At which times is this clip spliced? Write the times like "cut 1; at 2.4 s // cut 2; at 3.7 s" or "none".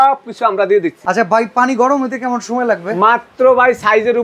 cut 1; at 1.0 s